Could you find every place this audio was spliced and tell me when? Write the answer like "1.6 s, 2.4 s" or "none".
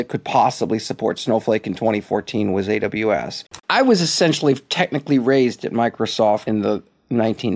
3.6 s, 6.4 s

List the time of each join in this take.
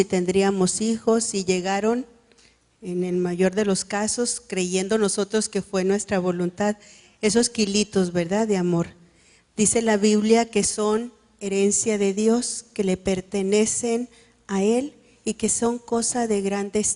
none

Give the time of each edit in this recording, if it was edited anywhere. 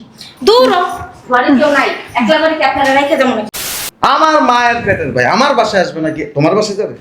3.5 s

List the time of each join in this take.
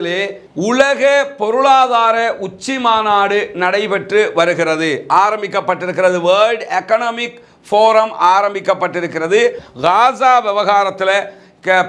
9.7 s

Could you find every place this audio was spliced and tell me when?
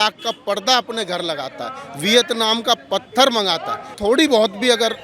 3.9 s

